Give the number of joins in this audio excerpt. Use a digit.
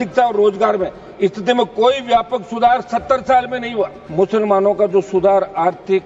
1